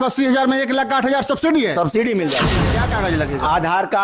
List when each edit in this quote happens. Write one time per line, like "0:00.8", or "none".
0:02.6